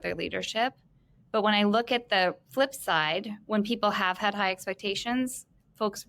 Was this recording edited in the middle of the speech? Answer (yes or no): no